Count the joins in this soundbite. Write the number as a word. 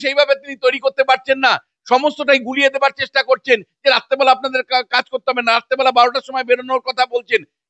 zero